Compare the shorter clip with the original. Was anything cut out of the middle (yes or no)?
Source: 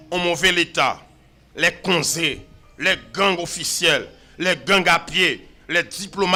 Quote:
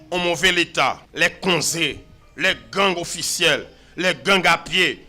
yes